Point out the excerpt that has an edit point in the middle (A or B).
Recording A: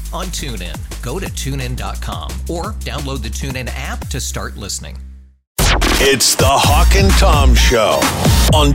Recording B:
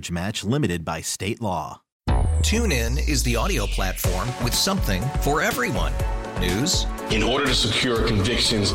A